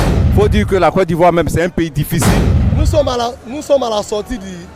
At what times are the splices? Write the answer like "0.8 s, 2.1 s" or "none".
none